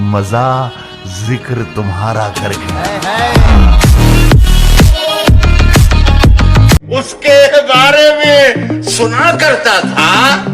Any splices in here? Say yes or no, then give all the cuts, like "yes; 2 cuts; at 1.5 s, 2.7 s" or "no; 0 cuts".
yes; 1 cut; at 6.8 s